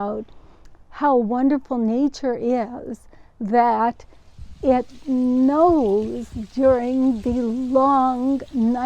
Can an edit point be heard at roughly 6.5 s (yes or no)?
no